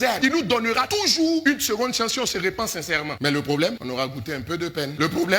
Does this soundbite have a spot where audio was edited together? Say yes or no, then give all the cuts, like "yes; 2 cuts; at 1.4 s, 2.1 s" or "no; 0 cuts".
no; 0 cuts